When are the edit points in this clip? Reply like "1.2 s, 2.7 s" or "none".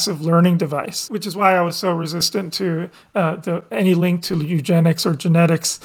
1.1 s

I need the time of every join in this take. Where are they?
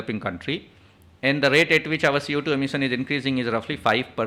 none

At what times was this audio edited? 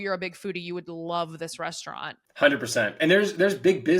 2.2 s

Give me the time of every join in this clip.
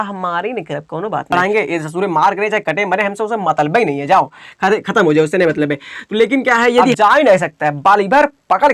1.3 s, 7.0 s

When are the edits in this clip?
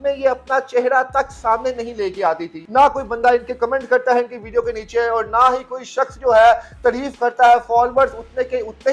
2.6 s

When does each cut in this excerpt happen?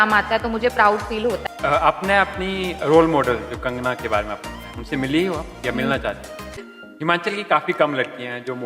1.4 s, 6.4 s

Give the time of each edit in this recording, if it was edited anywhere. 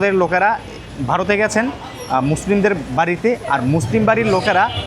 none

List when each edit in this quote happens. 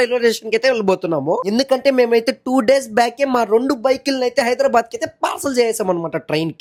none

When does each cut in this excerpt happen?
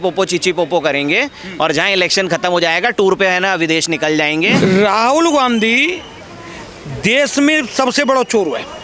4.5 s

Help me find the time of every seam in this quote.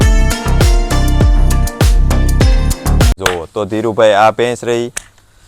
3.2 s

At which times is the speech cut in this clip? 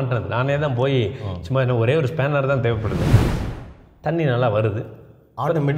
3.4 s

